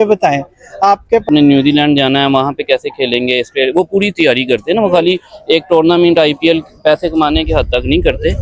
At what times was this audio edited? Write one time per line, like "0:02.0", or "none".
0:01.3